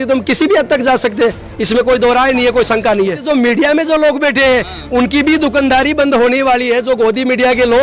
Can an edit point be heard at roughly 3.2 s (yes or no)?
yes